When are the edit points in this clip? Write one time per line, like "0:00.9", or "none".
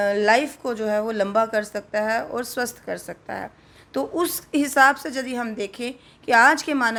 none